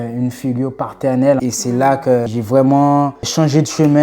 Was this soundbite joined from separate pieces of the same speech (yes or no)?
yes